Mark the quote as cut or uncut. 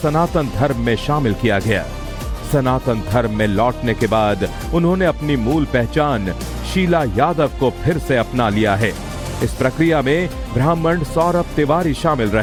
uncut